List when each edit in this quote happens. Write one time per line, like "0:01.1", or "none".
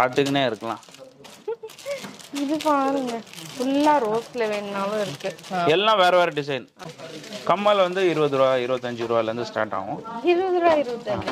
0:06.8